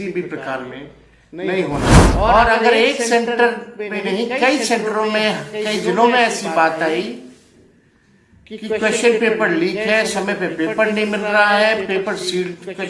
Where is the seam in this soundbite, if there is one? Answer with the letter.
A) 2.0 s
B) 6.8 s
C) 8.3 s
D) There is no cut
A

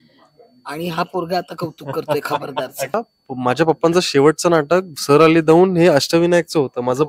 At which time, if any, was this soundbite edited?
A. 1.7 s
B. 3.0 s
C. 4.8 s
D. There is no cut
B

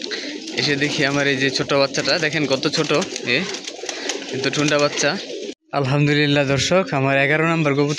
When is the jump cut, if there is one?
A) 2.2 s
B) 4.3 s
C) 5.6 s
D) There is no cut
C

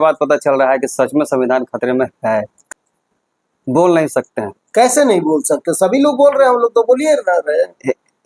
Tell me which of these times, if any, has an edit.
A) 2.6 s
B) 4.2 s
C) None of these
A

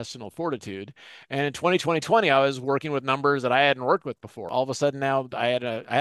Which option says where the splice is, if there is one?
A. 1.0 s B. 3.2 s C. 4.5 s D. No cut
C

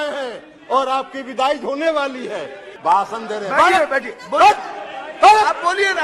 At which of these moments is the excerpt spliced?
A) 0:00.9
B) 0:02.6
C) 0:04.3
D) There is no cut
B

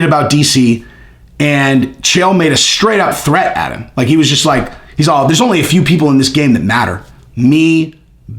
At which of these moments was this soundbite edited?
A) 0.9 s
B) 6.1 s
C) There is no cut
C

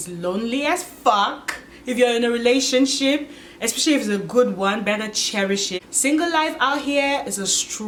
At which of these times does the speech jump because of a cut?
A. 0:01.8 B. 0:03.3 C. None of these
C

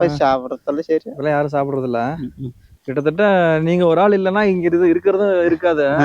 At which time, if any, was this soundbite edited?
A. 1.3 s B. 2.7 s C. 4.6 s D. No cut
B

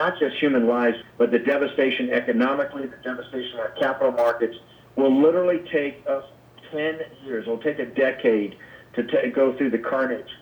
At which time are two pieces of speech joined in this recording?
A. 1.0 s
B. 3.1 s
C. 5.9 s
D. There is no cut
A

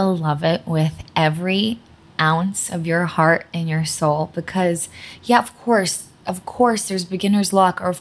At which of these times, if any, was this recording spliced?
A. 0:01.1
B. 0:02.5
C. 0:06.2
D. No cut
D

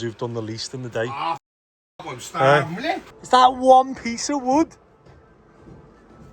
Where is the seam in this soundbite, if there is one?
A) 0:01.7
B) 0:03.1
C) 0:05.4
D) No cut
B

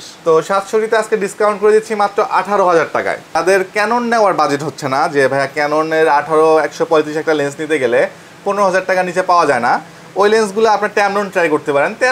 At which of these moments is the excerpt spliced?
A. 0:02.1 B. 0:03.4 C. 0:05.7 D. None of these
B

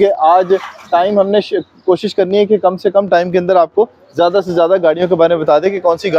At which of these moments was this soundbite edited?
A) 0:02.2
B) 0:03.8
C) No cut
C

